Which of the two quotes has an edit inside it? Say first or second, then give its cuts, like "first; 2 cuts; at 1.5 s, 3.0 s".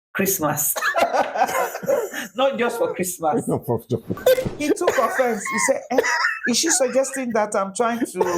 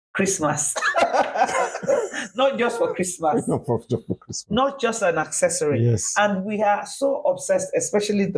first; 1 cut; at 4.2 s